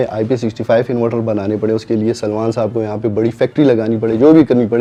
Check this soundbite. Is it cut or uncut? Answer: uncut